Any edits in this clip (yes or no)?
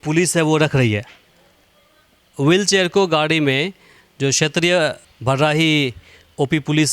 yes